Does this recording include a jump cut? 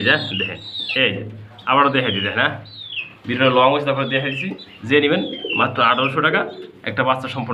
no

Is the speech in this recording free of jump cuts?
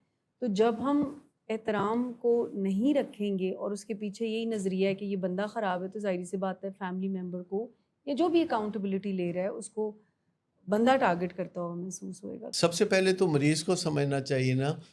no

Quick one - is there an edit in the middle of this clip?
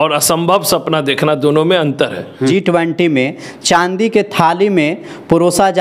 yes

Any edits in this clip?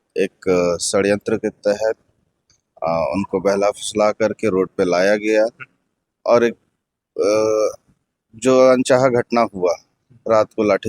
no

